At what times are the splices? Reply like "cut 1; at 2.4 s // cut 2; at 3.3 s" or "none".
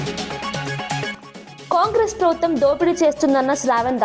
cut 1; at 1.1 s